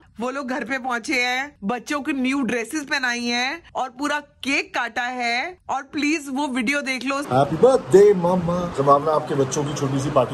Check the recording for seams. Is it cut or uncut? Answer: cut